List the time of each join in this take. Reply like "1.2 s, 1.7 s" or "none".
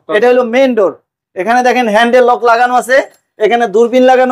none